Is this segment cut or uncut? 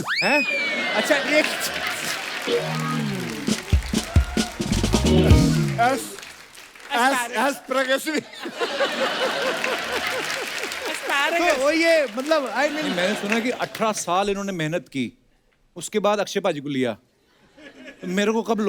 cut